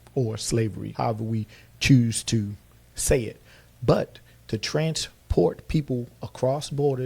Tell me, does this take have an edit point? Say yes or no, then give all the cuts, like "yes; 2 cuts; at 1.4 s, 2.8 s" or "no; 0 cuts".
no; 0 cuts